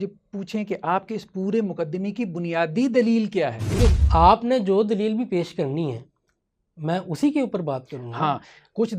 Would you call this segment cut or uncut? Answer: cut